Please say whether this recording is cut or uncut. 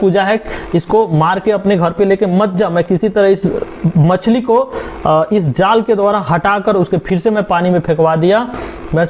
uncut